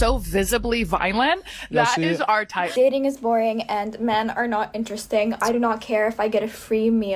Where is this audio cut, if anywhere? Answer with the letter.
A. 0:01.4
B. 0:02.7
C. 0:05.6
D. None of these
B